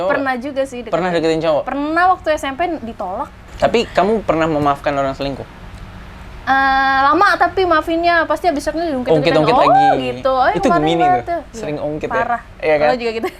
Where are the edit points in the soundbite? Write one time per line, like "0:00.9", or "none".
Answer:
0:03.4